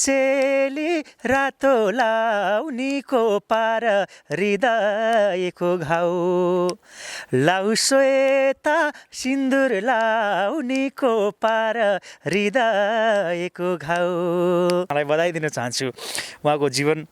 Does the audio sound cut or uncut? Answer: cut